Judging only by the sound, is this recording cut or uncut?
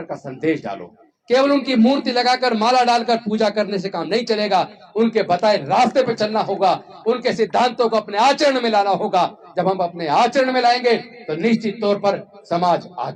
uncut